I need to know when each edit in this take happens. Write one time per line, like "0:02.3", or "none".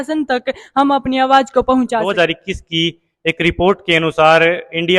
0:02.1